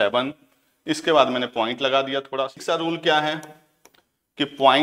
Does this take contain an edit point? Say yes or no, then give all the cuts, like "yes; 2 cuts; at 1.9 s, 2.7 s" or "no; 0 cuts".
yes; 1 cut; at 2.6 s